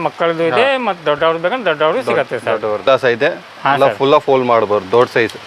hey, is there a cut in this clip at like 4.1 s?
no; 1 cut; at 2.9 s

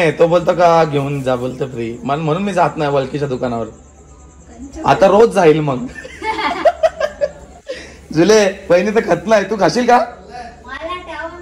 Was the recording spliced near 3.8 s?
no; 0 cuts

